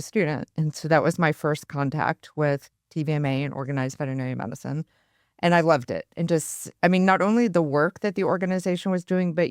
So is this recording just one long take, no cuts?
yes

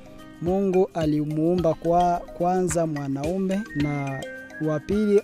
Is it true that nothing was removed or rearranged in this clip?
no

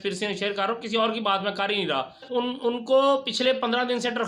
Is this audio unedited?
no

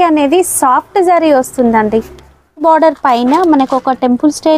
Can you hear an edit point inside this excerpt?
yes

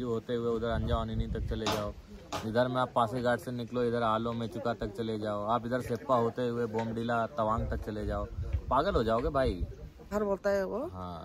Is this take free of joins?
no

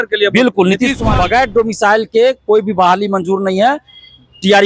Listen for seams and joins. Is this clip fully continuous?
no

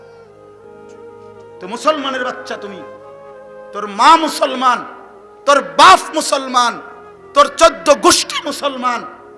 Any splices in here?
no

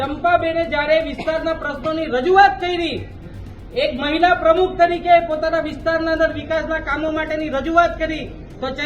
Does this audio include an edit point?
no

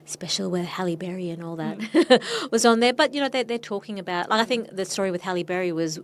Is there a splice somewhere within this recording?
no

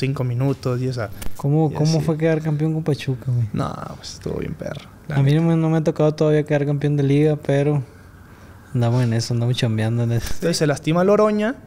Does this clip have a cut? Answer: yes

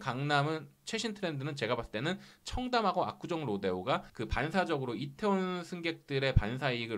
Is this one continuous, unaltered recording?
yes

